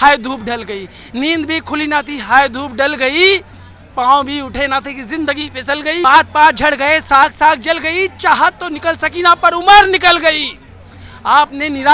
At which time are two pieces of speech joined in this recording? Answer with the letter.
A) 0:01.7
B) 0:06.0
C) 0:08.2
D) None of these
B